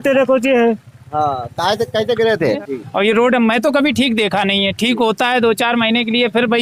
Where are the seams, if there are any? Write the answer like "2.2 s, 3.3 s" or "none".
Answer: 2.6 s